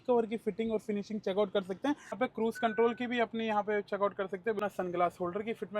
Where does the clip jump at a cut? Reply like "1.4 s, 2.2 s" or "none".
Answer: 2.2 s, 4.6 s